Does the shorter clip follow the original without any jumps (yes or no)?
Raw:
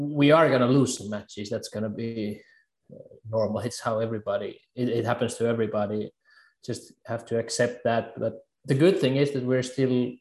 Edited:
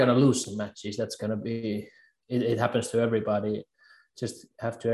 no